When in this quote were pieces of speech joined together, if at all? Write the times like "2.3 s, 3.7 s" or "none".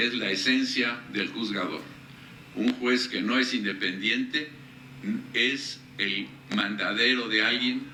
none